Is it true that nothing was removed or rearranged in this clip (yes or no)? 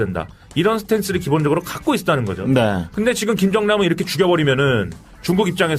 yes